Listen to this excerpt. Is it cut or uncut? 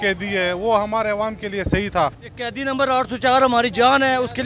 cut